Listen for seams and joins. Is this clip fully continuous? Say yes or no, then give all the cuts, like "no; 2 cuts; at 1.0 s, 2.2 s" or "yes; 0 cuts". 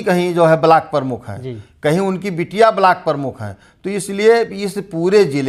yes; 0 cuts